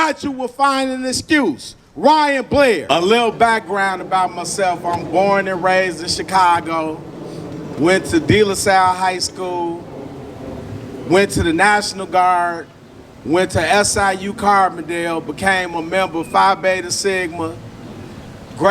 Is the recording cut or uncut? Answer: cut